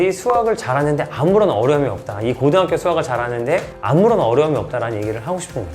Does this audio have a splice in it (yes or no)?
no